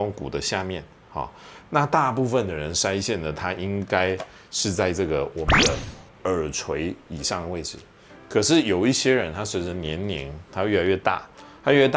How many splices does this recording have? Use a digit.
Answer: 0